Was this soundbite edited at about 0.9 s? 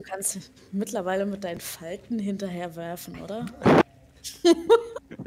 no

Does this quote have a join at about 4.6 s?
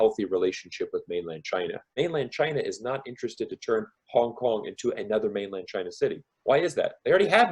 no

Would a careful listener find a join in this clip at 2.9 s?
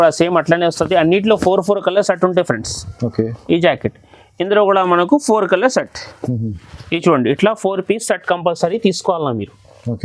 no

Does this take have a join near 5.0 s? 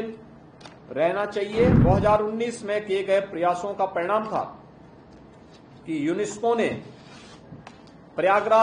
no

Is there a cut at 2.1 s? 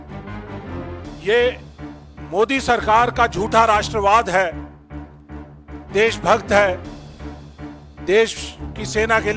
no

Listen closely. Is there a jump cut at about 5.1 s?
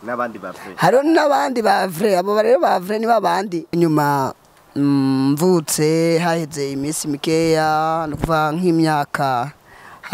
no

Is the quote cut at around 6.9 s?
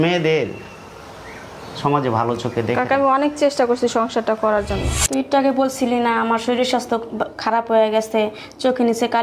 no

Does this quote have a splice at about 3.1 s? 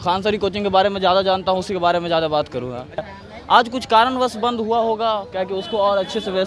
yes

